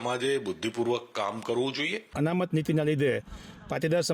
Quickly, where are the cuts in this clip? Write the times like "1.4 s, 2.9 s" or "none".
2.1 s